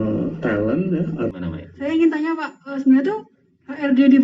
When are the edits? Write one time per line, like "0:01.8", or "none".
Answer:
0:01.3